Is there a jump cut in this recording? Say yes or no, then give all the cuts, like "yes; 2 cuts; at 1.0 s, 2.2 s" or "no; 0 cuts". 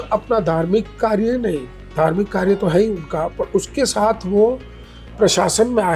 no; 0 cuts